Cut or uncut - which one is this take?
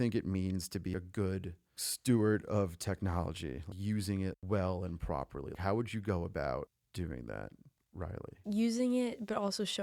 uncut